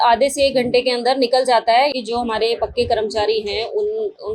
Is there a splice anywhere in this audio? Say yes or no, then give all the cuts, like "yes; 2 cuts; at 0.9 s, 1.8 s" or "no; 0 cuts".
yes; 1 cut; at 1.9 s